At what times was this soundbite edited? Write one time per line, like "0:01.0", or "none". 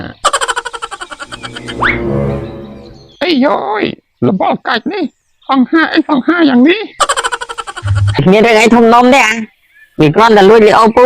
0:08.2